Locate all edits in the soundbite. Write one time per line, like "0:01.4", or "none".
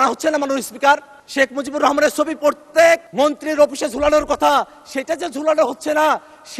0:01.2
0:03.1